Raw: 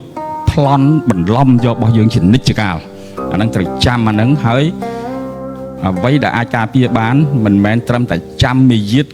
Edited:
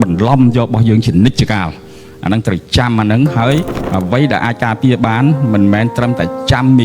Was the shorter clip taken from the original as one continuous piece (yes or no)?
no